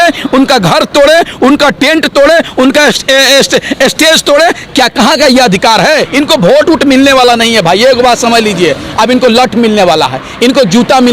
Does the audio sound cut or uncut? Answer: cut